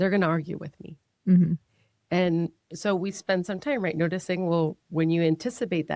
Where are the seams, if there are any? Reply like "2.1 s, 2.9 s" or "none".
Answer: none